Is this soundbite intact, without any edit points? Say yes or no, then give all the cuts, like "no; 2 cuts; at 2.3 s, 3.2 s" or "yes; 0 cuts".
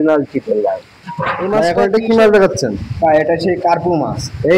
no; 1 cut; at 1.6 s